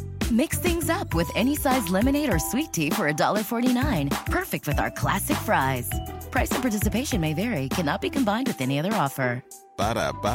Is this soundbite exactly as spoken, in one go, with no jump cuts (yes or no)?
yes